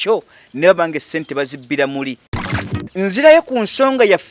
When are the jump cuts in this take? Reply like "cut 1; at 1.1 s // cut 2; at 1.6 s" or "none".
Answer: cut 1; at 2.3 s